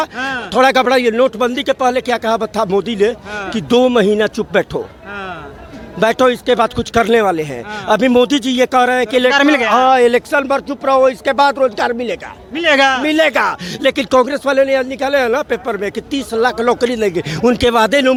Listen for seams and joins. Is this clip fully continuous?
yes; 0 cuts

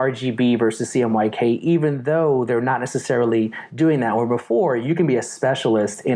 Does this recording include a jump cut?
no; 0 cuts

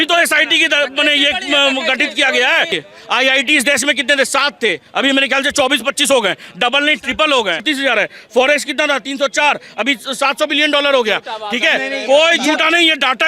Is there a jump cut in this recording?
yes; 2 cuts; at 2.7 s, 7.6 s

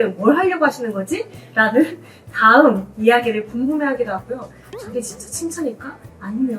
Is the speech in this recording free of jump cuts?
no; 1 cut; at 4.6 s

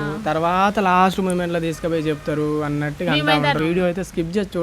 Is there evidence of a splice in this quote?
yes; 1 cut; at 3.6 s

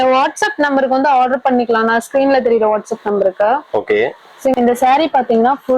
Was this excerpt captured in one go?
no; 1 cut; at 4.5 s

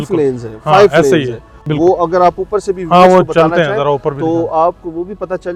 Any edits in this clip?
no; 0 cuts

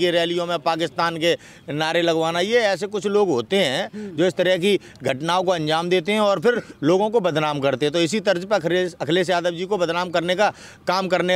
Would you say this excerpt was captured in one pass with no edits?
yes; 0 cuts

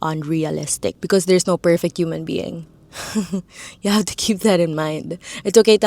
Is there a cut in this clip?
no; 0 cuts

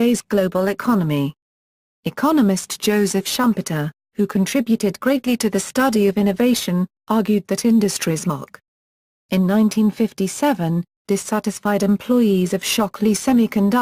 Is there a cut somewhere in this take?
no; 0 cuts

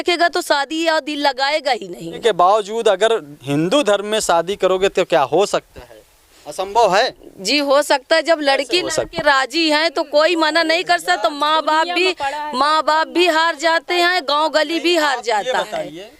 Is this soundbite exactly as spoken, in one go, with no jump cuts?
no; 1 cut; at 2.2 s

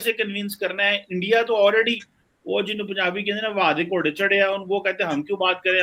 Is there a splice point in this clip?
no; 0 cuts

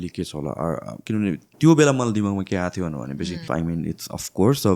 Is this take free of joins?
no; 2 cuts; at 1.0 s, 3.5 s

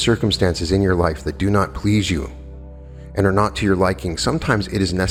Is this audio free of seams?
yes; 0 cuts

